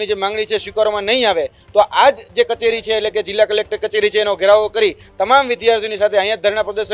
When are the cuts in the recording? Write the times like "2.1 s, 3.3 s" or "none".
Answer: none